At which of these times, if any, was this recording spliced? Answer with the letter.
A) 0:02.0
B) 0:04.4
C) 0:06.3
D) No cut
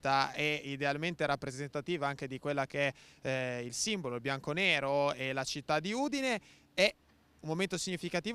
B